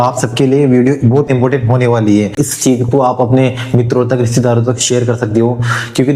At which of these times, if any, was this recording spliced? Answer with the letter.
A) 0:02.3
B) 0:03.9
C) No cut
A